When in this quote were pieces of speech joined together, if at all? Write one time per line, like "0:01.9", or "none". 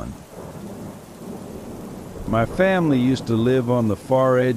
0:00.7
0:02.2